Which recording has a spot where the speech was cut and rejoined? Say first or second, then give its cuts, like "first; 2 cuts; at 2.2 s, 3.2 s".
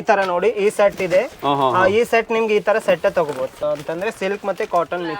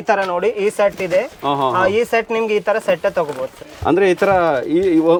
first; 1 cut; at 3.6 s